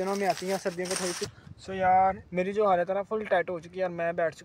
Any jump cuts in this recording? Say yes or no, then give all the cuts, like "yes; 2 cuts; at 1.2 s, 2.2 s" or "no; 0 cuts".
yes; 2 cuts; at 1.3 s, 2.2 s